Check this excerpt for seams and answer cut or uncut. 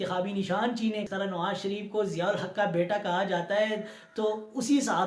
cut